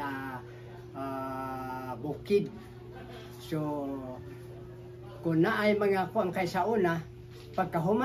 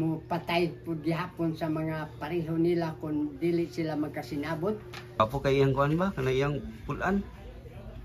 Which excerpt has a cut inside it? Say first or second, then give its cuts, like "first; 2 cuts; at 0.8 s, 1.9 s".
second; 1 cut; at 5.2 s